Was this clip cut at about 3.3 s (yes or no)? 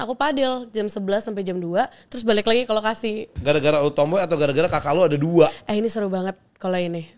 yes